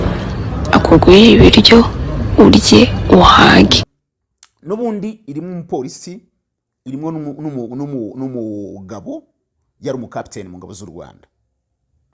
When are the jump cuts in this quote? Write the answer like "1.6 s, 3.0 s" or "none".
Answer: 3.6 s

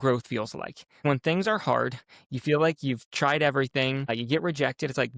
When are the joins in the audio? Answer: 1.0 s, 4.1 s

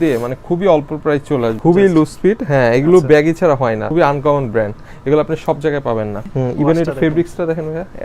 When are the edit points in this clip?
1.6 s, 3.8 s, 6.2 s

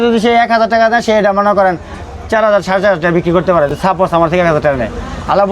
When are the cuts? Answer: none

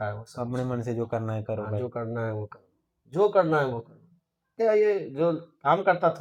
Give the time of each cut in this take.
4.5 s

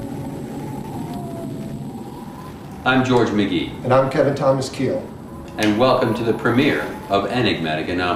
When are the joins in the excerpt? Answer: none

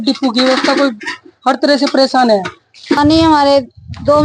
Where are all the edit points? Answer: 3.0 s

